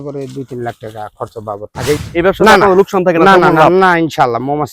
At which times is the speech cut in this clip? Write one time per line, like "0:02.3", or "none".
0:02.0